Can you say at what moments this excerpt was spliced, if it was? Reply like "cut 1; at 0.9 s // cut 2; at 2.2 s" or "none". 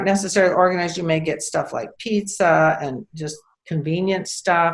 none